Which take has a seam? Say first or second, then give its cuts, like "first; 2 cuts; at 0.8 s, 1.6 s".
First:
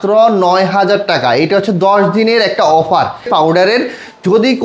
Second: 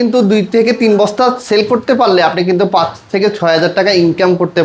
first; 1 cut; at 3.3 s